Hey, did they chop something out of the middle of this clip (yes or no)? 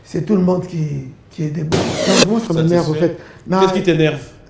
yes